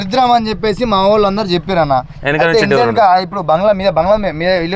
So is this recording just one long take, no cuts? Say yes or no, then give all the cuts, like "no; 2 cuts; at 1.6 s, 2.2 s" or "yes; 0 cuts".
yes; 0 cuts